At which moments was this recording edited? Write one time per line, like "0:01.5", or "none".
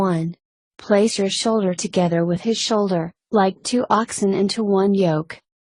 none